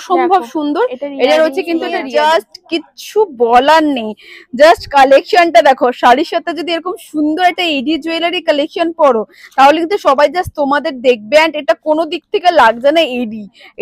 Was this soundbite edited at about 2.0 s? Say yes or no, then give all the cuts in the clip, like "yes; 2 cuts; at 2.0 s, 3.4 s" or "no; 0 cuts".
yes; 1 cut; at 2.0 s